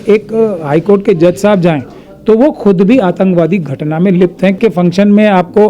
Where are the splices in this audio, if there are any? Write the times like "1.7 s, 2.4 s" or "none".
4.5 s